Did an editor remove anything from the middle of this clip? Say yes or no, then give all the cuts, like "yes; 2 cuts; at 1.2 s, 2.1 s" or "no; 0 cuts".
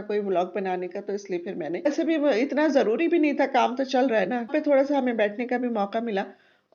yes; 2 cuts; at 1.9 s, 4.5 s